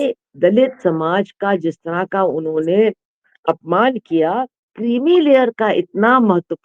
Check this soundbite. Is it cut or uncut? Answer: cut